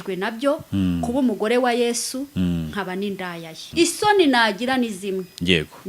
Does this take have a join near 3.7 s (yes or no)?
yes